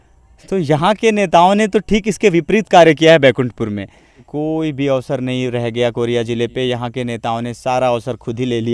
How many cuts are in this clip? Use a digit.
1